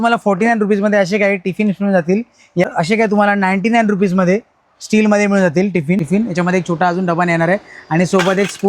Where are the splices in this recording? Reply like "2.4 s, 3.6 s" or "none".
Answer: 2.6 s, 6.0 s